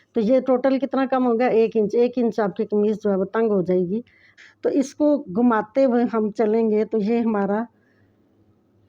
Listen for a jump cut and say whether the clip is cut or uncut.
cut